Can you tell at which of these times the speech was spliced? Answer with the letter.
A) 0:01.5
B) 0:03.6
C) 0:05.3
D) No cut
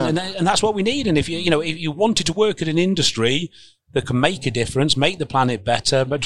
D